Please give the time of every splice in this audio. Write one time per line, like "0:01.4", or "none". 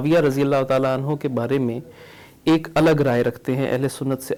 none

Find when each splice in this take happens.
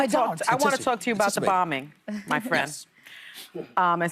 0:01.9

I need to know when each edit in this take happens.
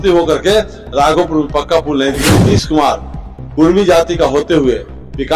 0:02.4

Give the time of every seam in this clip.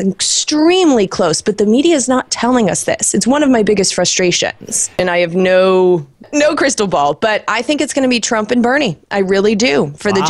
0:05.0
0:06.2

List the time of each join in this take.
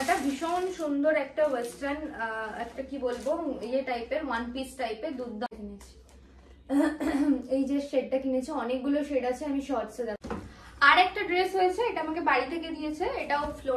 0:05.5
0:10.2

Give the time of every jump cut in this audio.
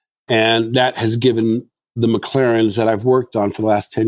none

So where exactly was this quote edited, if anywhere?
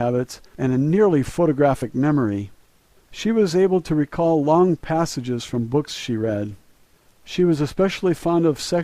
0:03.3

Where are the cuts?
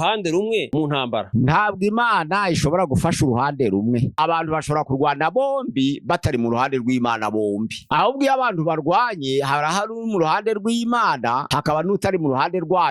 0:04.1
0:07.8
0:11.5

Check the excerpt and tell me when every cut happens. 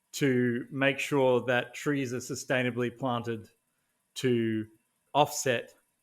0:05.0

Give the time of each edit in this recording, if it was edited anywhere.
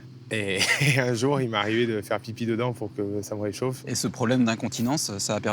0:03.9

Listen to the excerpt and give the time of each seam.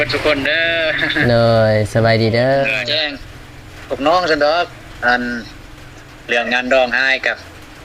0:02.8

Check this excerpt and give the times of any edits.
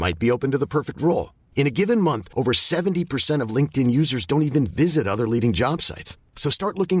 none

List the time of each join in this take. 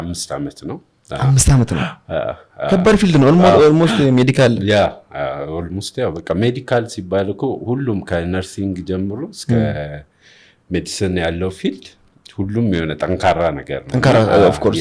none

